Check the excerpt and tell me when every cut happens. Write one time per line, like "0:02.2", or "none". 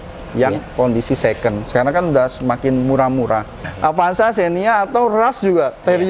0:03.6